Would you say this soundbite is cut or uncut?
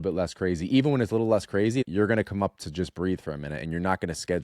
cut